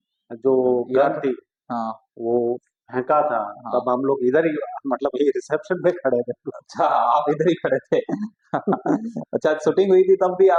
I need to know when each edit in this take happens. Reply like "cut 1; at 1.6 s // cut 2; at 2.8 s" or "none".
none